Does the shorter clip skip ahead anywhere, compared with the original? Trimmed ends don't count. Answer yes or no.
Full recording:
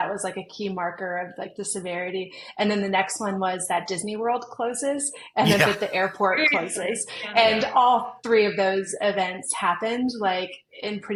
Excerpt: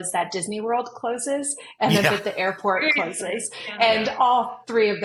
no